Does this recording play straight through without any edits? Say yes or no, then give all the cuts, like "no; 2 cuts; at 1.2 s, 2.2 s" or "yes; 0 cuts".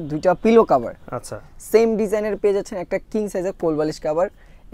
yes; 0 cuts